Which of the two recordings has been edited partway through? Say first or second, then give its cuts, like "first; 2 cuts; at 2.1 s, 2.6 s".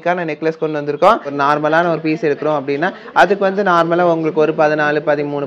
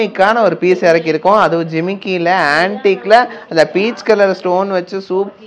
first; 1 cut; at 1.3 s